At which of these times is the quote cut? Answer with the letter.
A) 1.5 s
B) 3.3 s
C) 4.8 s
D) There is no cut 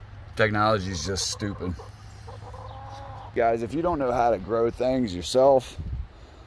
B